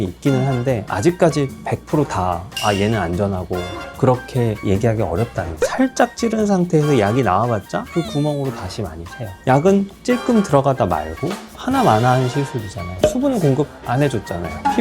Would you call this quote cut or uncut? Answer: cut